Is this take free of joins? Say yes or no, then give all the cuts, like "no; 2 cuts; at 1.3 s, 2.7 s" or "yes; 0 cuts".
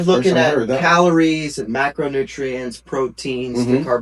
yes; 0 cuts